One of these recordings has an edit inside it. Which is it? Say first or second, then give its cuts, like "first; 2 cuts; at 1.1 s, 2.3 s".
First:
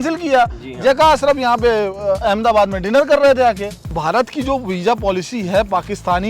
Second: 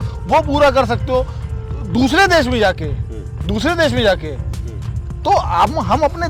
first; 1 cut; at 4.0 s